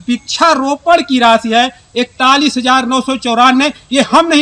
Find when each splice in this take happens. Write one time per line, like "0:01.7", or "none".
none